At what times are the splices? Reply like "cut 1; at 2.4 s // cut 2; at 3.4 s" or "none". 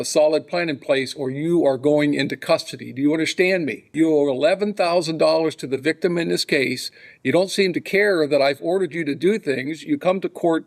cut 1; at 3.8 s